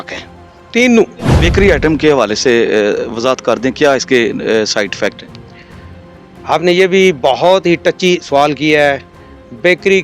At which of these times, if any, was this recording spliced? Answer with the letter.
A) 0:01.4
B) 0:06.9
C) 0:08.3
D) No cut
A